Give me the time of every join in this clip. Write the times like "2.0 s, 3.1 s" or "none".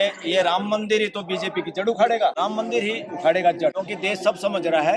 2.4 s, 3.8 s

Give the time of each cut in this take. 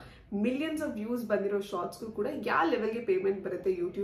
none

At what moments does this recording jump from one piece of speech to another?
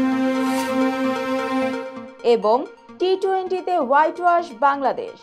1.9 s

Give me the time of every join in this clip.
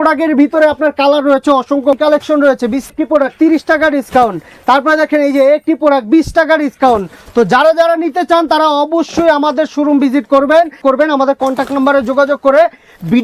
2.0 s, 2.9 s, 10.8 s

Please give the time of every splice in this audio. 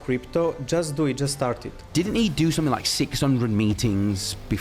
1.7 s

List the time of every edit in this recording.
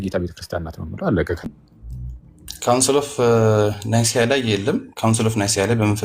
1.5 s

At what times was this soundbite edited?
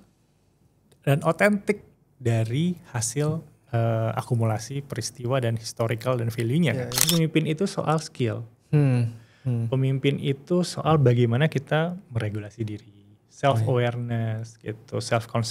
7.1 s

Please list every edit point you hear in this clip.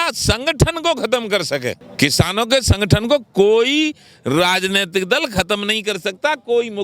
1.8 s

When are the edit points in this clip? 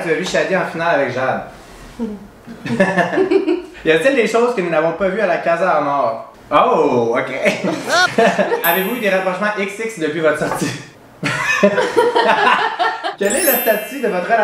3.7 s, 6.3 s, 8.6 s, 13.0 s

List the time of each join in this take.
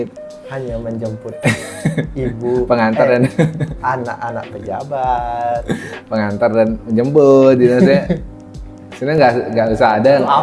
none

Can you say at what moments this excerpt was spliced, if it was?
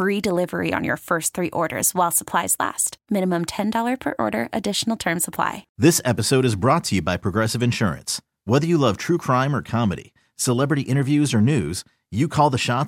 5.6 s

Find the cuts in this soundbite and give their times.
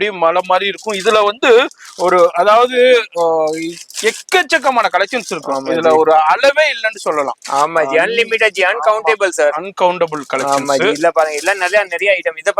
none

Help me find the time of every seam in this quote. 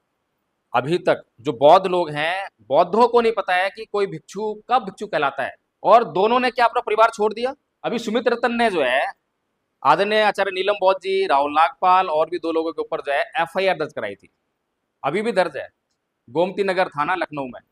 5.6 s, 7.7 s

